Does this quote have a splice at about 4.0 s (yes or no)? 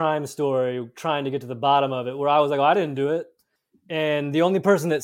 no